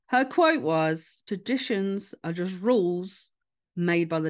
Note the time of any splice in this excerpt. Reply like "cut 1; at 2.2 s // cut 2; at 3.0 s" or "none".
cut 1; at 1.1 s